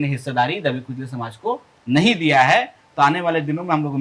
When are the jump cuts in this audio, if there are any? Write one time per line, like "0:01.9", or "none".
none